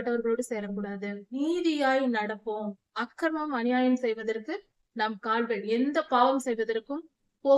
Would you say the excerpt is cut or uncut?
cut